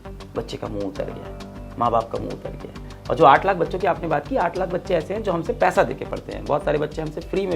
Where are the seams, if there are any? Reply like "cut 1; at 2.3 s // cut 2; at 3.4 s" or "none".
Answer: none